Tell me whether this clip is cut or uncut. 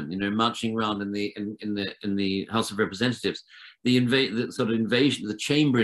uncut